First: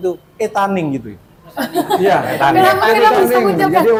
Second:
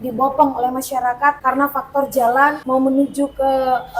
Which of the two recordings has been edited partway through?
second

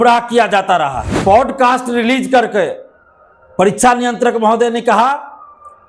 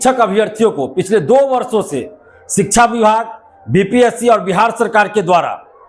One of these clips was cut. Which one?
first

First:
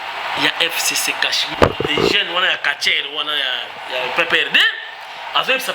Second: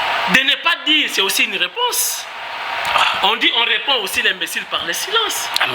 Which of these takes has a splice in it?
first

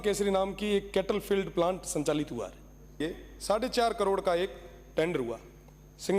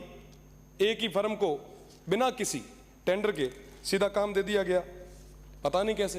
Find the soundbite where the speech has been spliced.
first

